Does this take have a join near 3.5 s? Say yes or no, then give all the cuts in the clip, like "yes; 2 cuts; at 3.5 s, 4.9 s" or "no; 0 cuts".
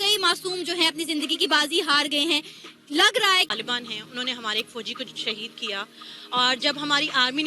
yes; 1 cut; at 3.5 s